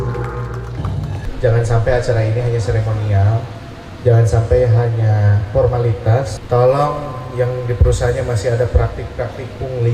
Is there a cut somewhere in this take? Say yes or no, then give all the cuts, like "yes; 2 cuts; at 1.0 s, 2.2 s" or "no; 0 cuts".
yes; 2 cuts; at 1.2 s, 6.3 s